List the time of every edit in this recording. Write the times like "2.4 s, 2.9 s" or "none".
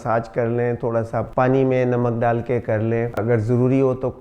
3.2 s